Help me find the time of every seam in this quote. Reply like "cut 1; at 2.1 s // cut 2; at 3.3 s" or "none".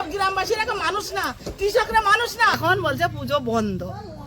cut 1; at 2.6 s